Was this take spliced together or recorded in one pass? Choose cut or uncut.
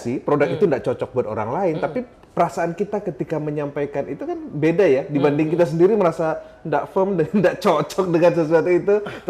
uncut